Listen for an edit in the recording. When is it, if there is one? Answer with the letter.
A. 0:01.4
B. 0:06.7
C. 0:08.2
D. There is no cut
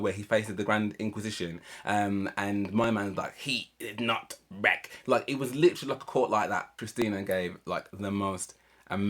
B